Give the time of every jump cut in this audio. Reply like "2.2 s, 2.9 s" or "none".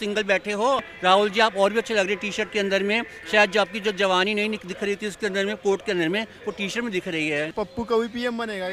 0.9 s, 7.5 s